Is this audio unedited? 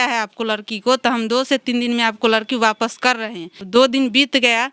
no; 1 cut; at 3.5 s

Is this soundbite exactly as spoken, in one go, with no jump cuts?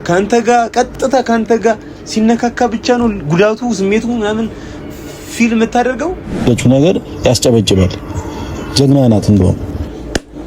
no; 1 cut; at 6.4 s

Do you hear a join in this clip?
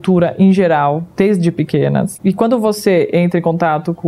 yes; 2 cuts; at 1.1 s, 2.1 s

